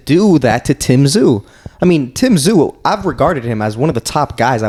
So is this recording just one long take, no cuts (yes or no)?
yes